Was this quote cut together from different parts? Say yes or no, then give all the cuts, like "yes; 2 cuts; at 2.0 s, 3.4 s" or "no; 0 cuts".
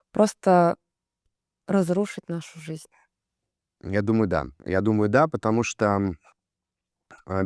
no; 0 cuts